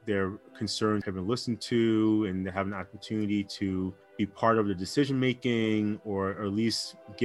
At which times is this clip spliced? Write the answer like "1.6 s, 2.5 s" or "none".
1.0 s